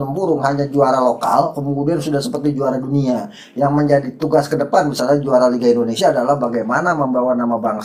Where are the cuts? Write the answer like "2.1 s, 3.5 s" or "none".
none